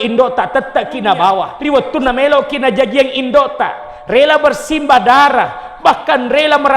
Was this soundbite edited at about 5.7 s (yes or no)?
no